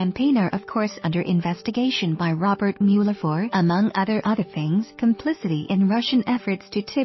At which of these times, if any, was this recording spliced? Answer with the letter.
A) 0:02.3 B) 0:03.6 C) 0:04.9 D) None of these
D